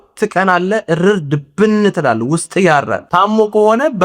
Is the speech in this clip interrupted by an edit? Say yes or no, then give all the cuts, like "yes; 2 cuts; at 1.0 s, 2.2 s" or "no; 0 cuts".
yes; 1 cut; at 3.0 s